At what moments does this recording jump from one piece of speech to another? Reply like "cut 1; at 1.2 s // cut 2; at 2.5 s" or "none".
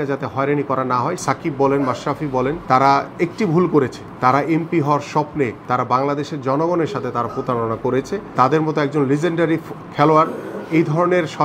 cut 1; at 1.2 s // cut 2; at 2.6 s // cut 3; at 4.0 s // cut 4; at 5.6 s // cut 5; at 8.3 s